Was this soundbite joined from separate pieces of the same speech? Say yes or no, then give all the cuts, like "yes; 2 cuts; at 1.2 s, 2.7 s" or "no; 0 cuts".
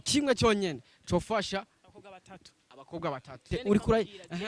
yes; 1 cut; at 3.5 s